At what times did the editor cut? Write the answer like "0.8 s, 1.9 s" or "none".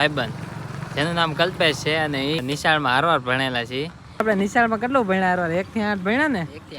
2.4 s, 4.2 s